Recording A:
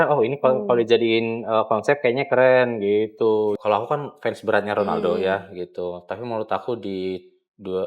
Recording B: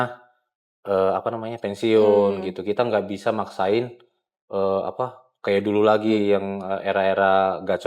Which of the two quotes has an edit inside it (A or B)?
A